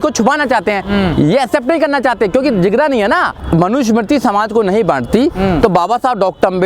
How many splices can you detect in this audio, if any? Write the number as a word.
one